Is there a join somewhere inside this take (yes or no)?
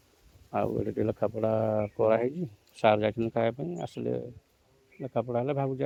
no